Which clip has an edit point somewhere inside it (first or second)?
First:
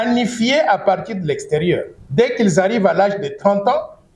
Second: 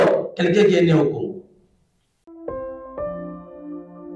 second